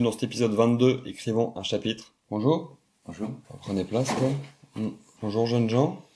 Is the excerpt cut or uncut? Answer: cut